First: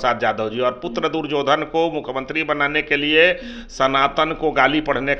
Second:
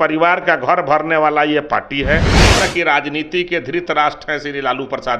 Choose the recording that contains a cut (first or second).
second